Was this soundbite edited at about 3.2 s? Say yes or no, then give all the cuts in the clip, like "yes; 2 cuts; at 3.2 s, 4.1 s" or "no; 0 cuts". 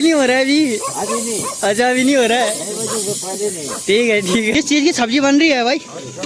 no; 1 cut; at 4.5 s